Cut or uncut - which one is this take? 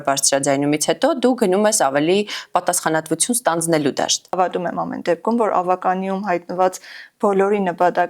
cut